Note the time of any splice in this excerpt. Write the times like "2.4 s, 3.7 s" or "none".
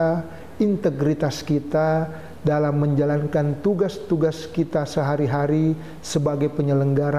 none

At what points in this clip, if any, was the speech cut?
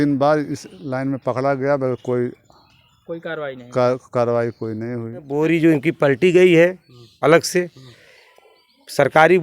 5.3 s

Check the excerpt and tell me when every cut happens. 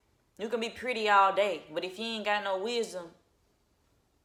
none

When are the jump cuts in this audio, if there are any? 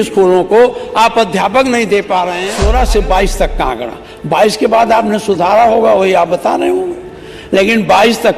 2.5 s

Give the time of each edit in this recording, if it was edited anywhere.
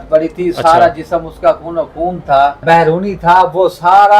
2.6 s

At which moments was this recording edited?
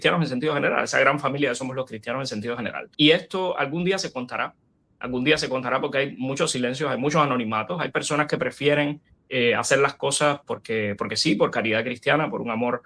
2.9 s

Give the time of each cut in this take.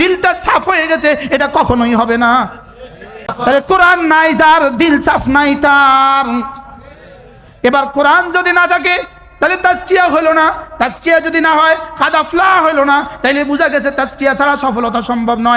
3.3 s

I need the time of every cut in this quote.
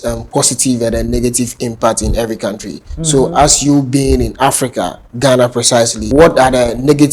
6.0 s

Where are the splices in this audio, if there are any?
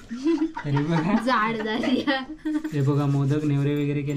none

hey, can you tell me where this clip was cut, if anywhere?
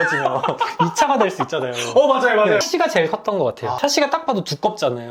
2.6 s

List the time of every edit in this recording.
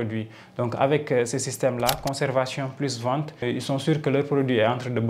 3.4 s

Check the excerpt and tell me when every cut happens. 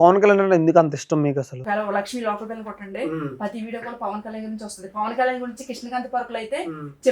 1.6 s

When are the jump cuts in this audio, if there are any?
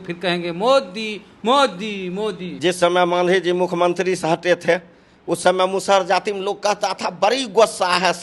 2.5 s

